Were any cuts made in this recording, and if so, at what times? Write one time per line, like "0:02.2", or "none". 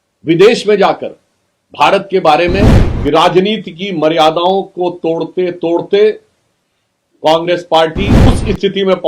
0:02.8
0:08.3